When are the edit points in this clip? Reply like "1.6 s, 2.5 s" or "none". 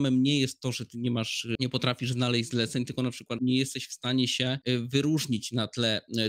1.6 s, 3.3 s, 4.6 s